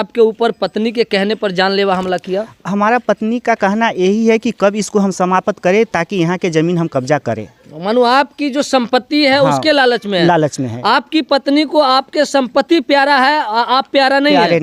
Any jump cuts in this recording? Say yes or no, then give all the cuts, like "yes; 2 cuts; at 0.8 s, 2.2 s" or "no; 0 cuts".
no; 0 cuts